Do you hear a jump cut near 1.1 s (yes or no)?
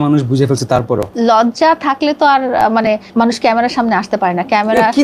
yes